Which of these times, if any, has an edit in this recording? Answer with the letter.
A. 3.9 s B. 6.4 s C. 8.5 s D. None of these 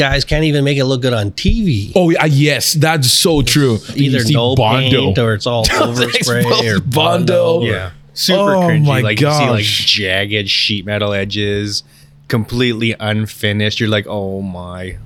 A